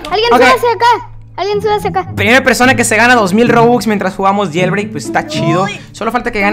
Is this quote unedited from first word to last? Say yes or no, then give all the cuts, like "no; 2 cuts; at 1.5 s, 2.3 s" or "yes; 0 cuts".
yes; 0 cuts